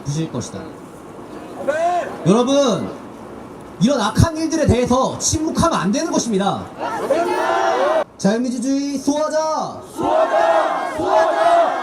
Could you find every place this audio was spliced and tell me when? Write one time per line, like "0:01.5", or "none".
0:08.1